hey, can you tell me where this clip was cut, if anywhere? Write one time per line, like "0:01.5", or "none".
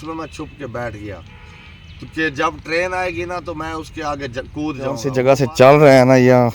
0:05.1

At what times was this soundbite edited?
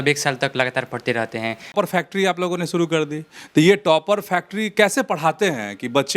0:01.7

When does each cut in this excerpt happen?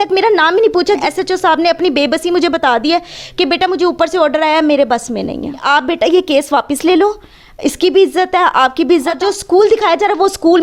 0:01.0
0:05.6
0:09.2

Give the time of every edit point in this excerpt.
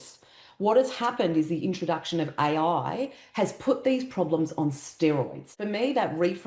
0:05.5

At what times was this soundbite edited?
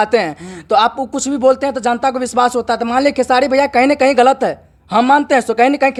none

